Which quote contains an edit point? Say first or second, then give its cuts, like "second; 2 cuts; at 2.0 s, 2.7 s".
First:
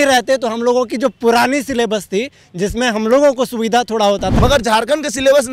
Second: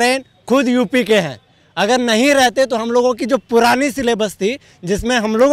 first; 1 cut; at 4.3 s